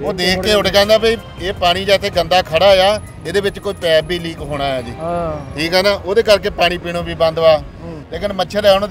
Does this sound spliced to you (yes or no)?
no